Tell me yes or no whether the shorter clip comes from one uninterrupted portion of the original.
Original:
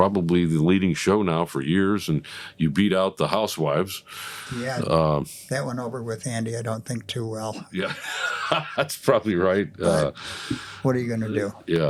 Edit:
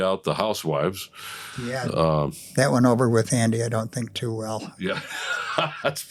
yes